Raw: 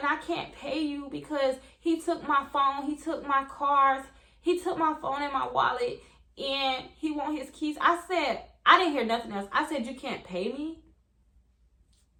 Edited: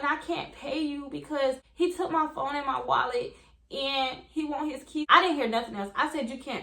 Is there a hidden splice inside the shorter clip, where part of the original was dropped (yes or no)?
yes